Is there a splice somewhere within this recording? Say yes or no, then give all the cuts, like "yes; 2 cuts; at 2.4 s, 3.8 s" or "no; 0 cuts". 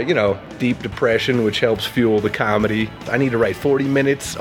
yes; 1 cut; at 3.0 s